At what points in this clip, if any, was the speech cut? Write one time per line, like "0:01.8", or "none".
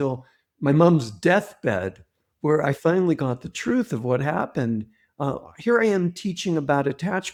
none